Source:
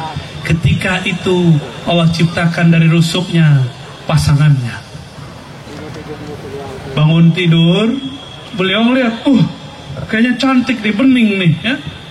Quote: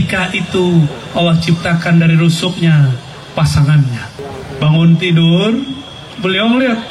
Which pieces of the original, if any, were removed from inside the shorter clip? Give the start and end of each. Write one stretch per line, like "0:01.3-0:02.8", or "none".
0:04.9-0:06.5